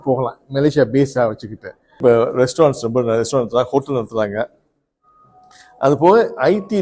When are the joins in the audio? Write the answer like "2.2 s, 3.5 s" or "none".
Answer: 2.0 s